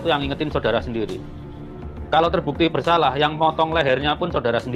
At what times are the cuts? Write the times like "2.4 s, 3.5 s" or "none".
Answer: none

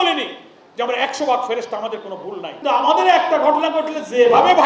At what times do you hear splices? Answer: 2.5 s

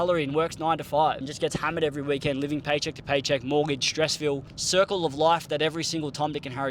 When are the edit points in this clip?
1.3 s, 4.5 s

